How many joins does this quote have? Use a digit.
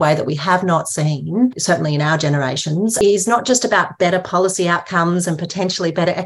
2